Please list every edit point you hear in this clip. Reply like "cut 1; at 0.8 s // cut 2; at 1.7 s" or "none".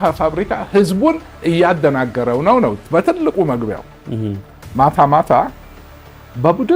cut 1; at 4.6 s